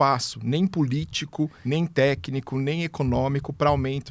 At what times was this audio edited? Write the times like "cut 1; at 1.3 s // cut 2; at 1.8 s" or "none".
cut 1; at 1.6 s